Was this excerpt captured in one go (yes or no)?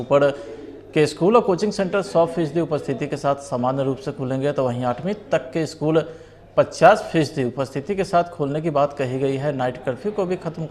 yes